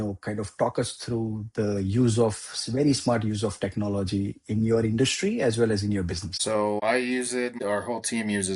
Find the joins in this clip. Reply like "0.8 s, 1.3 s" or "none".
6.7 s, 7.5 s